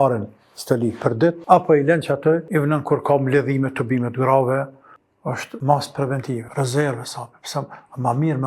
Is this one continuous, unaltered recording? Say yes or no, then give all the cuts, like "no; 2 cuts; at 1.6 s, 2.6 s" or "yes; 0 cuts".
no; 4 cuts; at 1.4 s, 2.5 s, 5.0 s, 6.5 s